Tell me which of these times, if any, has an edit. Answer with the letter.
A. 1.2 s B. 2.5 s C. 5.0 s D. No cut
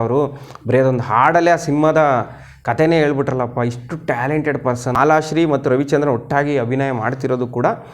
C